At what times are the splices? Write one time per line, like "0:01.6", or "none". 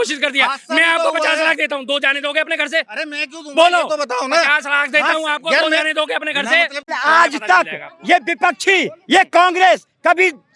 0:06.9